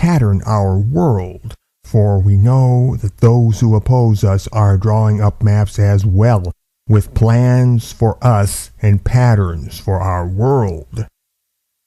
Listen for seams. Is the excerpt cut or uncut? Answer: uncut